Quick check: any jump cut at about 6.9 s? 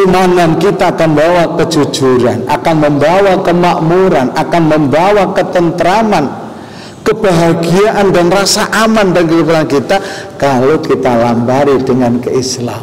no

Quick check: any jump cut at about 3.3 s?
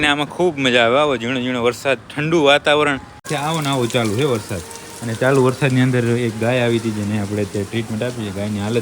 yes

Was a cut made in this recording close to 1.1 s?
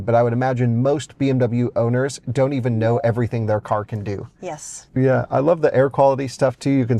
no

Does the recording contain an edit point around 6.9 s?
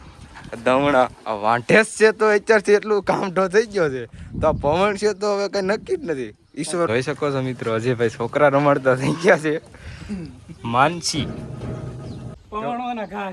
yes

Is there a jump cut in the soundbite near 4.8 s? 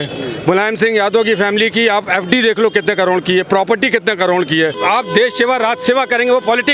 yes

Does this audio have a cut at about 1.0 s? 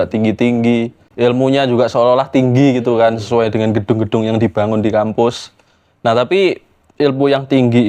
yes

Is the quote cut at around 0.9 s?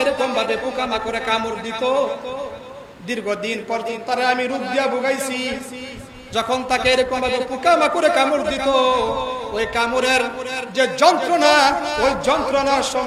no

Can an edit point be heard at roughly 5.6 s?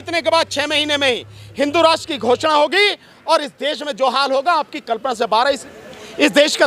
yes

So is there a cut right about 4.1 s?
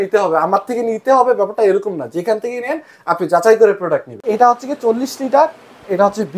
yes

